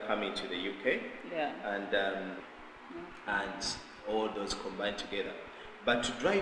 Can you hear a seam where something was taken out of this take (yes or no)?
yes